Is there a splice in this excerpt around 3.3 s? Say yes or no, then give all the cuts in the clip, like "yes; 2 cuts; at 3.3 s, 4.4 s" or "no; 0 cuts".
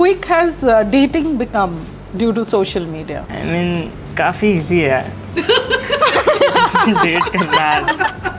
yes; 1 cut; at 3.3 s